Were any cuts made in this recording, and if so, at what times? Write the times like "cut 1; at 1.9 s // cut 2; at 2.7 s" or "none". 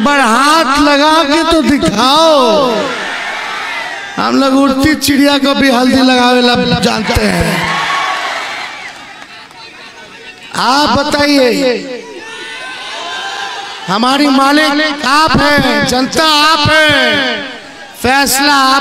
none